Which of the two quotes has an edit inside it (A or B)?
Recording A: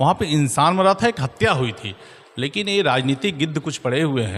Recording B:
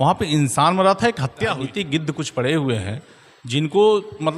B